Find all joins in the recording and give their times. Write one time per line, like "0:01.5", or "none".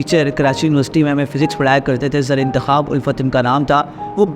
none